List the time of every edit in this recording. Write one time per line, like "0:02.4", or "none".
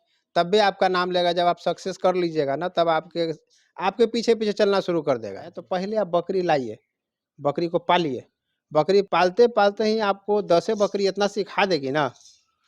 0:05.6
0:09.1